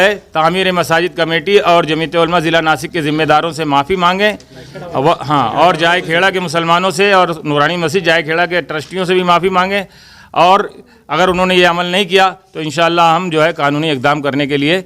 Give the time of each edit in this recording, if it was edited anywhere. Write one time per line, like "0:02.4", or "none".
none